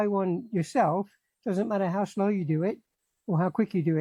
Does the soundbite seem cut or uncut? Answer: uncut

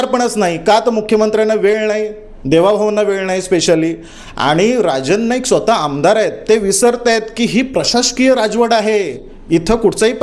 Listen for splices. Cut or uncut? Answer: uncut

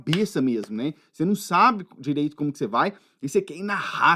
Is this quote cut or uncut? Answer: uncut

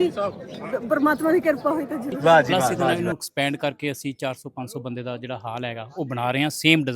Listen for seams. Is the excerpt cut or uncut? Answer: cut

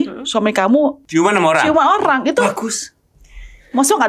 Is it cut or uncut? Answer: cut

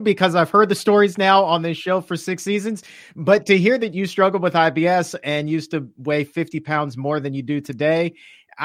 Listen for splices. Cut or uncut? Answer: uncut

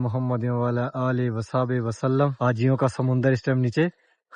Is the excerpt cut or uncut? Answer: cut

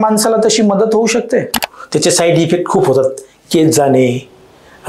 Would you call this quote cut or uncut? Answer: cut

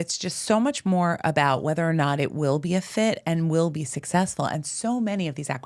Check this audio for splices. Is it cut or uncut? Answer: uncut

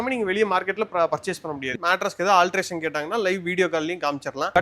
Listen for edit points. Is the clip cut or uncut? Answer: cut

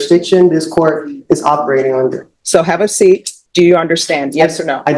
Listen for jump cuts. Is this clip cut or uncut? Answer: cut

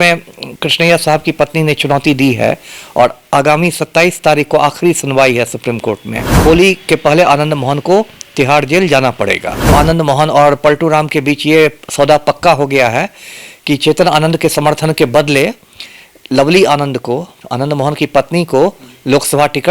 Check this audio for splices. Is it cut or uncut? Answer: cut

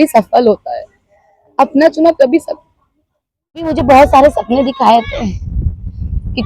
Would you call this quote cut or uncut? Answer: cut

